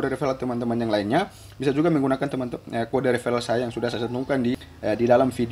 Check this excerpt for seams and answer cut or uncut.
cut